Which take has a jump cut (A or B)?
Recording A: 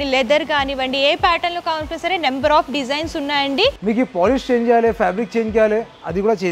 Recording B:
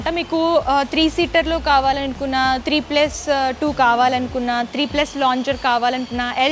A